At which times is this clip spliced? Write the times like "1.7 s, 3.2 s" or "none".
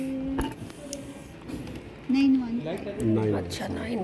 1.8 s

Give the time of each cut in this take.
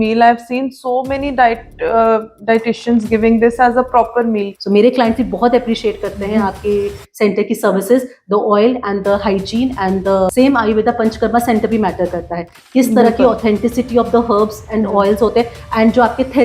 4.5 s, 10.3 s

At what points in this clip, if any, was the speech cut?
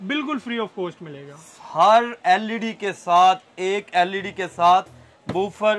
none

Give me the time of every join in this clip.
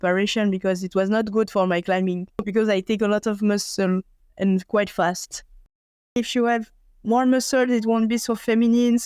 2.5 s, 6.2 s

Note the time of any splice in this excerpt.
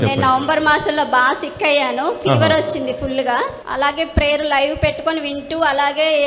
3.5 s

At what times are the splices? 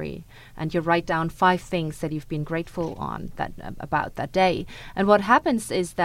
none

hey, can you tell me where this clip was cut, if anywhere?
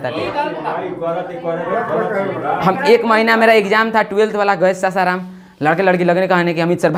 none

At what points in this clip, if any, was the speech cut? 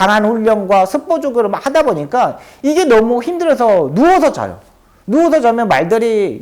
none

